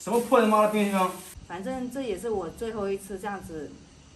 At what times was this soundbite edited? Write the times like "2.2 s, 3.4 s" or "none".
1.3 s